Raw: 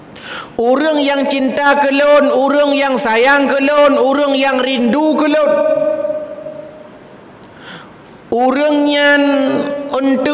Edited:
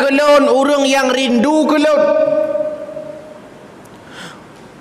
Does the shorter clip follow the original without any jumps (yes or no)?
yes